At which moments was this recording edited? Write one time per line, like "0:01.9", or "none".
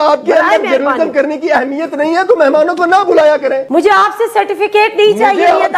0:03.6